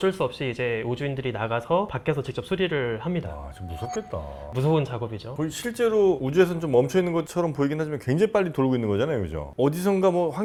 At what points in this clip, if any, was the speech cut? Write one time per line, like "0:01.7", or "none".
none

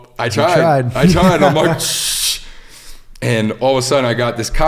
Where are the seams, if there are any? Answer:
none

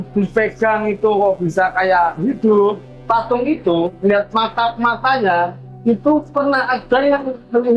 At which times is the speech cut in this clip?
0:02.9
0:05.6

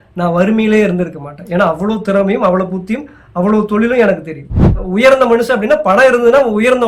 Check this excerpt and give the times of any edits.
0:04.8

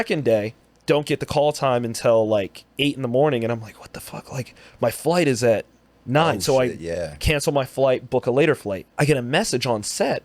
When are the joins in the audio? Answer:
0:08.8

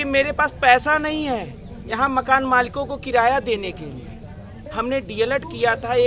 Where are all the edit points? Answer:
0:04.6

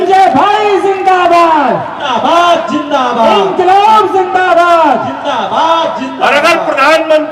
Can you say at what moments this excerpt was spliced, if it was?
none

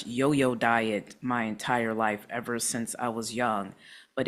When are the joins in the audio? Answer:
none

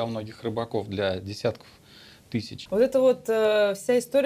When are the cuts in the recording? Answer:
0:02.6

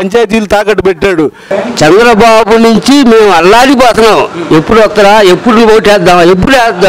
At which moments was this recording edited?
0:01.6

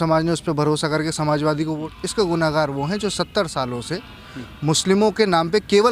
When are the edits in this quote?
0:01.9

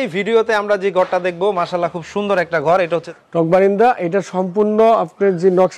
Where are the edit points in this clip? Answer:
0:03.0

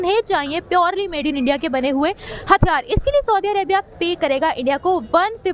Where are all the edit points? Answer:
none

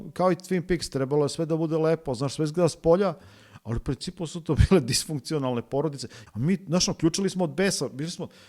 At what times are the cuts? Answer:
0:06.2

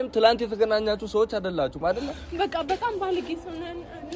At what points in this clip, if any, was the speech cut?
0:02.2

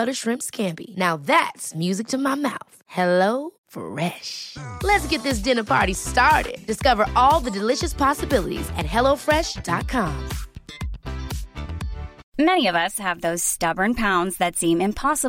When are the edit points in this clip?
0:12.2

